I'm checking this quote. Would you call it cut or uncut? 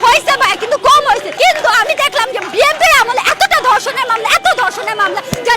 cut